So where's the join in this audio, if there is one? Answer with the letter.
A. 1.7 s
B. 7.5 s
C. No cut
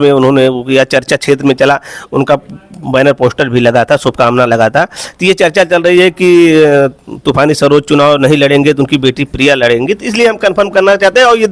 C